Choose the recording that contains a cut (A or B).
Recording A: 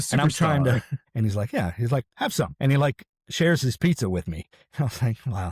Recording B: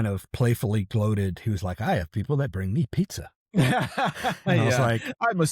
A